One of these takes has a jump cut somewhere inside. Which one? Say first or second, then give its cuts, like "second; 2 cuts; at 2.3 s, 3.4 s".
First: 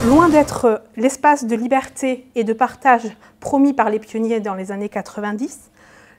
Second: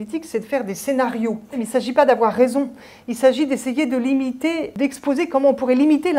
second; 2 cuts; at 1.6 s, 4.7 s